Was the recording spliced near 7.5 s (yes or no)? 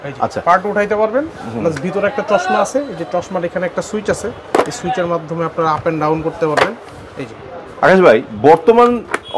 no